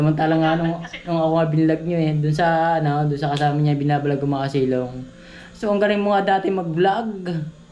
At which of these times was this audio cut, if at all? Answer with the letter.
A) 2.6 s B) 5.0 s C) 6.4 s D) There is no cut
D